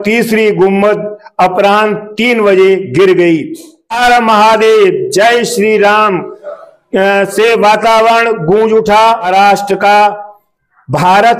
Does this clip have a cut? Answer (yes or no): yes